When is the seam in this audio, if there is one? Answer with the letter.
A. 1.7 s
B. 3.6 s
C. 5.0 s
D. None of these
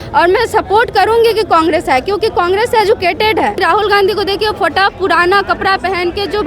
B